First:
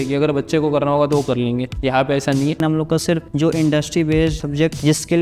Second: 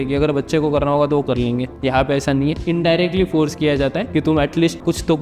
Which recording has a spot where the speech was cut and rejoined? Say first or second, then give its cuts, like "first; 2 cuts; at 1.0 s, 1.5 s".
first; 1 cut; at 2.6 s